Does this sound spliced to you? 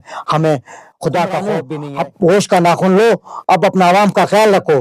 yes; 1 cut; at 1.7 s

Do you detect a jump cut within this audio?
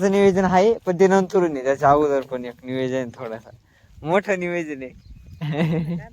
no; 0 cuts

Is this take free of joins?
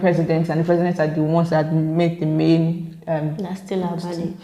yes; 0 cuts

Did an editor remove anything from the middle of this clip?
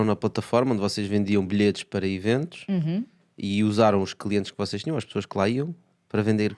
no; 0 cuts

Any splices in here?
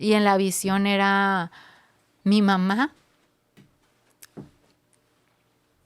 no; 0 cuts

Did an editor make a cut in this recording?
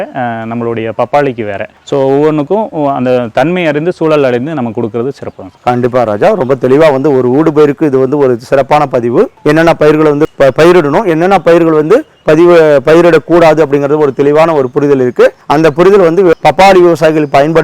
yes; 2 cuts; at 10.3 s, 16.3 s

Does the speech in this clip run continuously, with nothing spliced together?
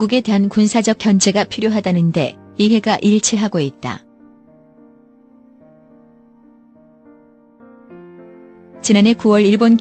no; 2 cuts; at 4.2 s, 8.8 s

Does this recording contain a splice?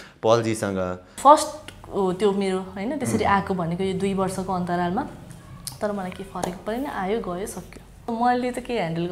yes; 2 cuts; at 1.1 s, 8.1 s

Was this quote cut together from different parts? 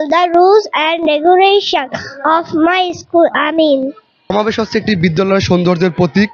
yes; 1 cut; at 4.3 s

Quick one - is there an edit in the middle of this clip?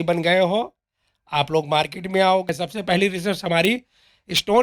yes; 1 cut; at 2.5 s

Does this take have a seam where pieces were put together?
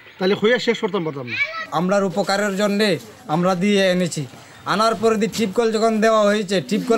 yes; 1 cut; at 1.6 s

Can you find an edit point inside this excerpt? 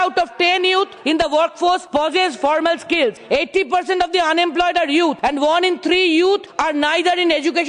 yes; 5 cuts; at 1.0 s, 1.8 s, 3.2 s, 5.2 s, 6.5 s

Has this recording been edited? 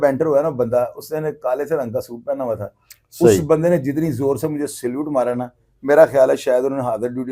no; 0 cuts

